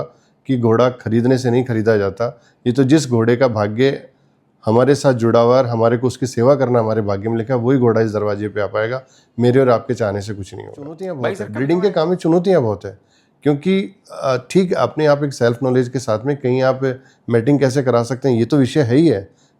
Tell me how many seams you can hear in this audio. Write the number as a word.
one